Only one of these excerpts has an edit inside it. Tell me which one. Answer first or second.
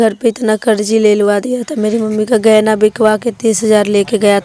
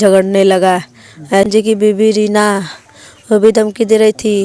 second